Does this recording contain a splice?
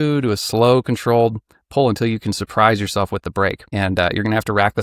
yes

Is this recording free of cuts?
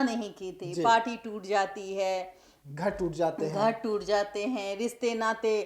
yes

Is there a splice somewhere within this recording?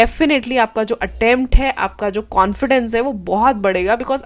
no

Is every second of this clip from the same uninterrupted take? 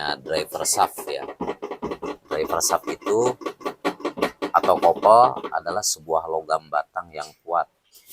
yes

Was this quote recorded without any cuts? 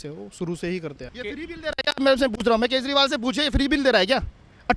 no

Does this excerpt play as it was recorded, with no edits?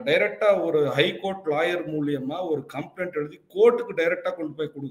yes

